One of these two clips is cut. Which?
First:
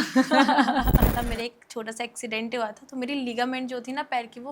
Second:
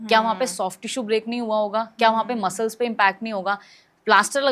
first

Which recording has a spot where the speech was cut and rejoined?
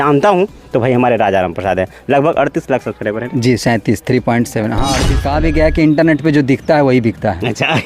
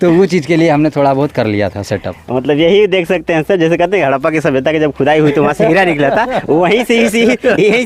first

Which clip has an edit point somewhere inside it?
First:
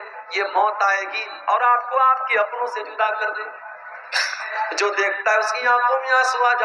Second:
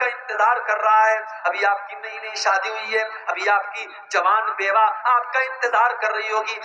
first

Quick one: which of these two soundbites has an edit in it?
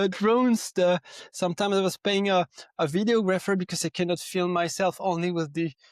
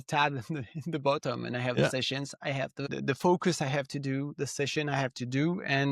second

